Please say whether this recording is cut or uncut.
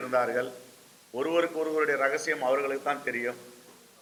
uncut